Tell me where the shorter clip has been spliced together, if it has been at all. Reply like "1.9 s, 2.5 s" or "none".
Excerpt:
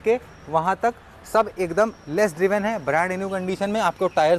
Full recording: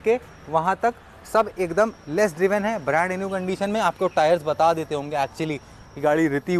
none